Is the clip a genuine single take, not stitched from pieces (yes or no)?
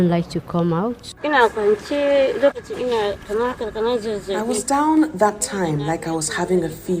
no